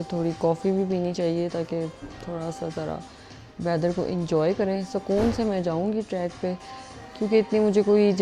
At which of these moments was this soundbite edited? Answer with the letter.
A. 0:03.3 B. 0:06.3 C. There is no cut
C